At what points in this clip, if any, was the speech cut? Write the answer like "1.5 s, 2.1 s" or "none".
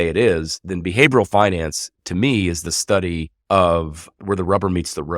3.3 s, 4.0 s